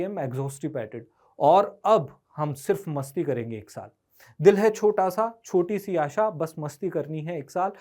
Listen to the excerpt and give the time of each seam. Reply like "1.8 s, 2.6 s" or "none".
none